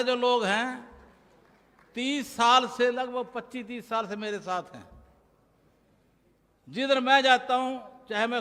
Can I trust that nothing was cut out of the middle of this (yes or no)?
yes